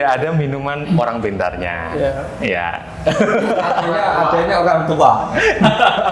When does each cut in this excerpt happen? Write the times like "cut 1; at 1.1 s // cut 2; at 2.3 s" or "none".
none